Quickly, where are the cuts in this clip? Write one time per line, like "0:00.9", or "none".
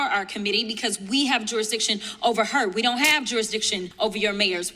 0:03.9